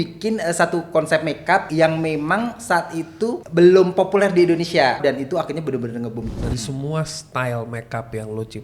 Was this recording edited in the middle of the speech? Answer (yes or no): yes